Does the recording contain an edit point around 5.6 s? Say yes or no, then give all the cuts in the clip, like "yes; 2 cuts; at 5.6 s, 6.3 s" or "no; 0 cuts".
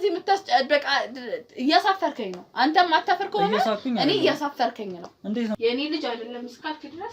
yes; 1 cut; at 5.6 s